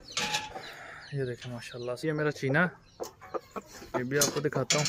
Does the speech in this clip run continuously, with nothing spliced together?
no; 1 cut; at 2.0 s

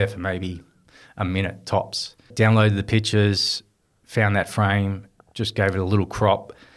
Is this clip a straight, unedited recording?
no; 1 cut; at 2.3 s

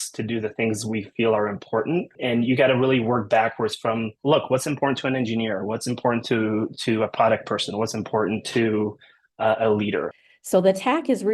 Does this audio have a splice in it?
yes; 3 cuts; at 2.1 s, 4.1 s, 10.1 s

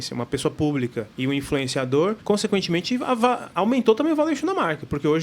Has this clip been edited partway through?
yes; 3 cuts; at 1.1 s, 2.2 s, 3.5 s

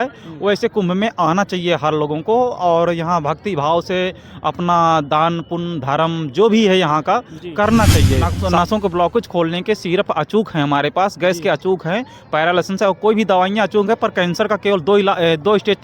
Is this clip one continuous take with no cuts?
no; 1 cut; at 8.4 s

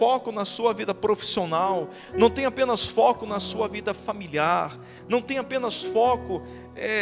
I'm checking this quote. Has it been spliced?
no; 0 cuts

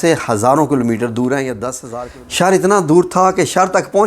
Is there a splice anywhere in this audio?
yes; 1 cut; at 1.8 s

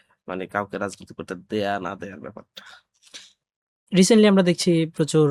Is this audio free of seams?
yes; 0 cuts

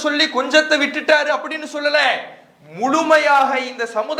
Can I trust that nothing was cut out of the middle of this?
yes; 0 cuts

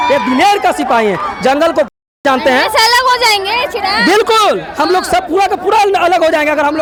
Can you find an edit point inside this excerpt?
no; 0 cuts

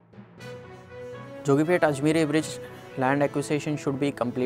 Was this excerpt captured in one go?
no; 1 cut; at 1.2 s

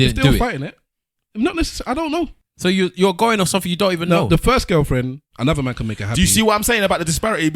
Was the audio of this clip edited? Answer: yes; 1 cut; at 2.4 s

